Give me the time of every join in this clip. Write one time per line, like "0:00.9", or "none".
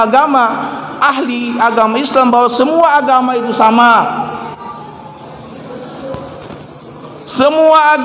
none